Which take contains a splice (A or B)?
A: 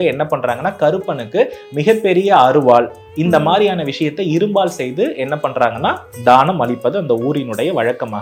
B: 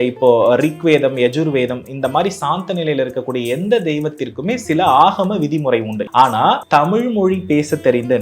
B